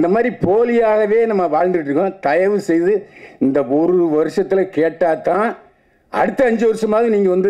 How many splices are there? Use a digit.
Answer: 0